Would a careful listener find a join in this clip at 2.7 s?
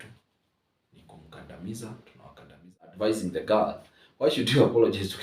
yes; 1 cut; at 2.7 s

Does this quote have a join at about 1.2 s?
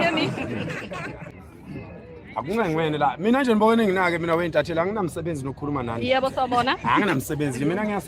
yes; 1 cut; at 1.2 s

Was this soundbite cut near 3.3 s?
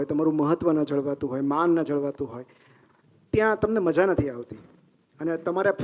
no; 0 cuts

